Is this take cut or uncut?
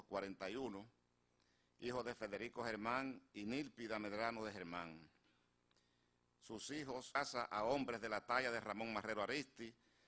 uncut